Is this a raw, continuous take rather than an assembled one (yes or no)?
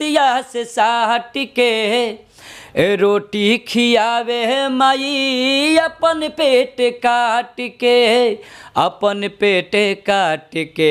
yes